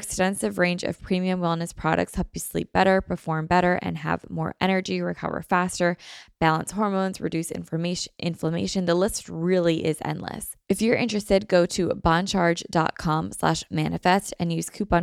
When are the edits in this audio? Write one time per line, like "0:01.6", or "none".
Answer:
0:10.5